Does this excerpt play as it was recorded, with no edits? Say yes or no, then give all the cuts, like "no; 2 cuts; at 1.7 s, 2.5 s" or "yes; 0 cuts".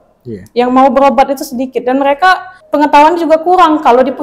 no; 1 cut; at 2.5 s